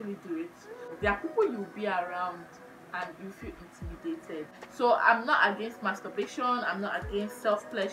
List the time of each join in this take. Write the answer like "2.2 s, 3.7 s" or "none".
0.9 s, 4.6 s